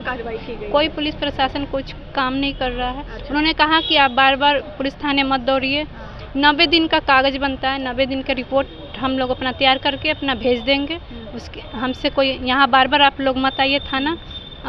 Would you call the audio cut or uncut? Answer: uncut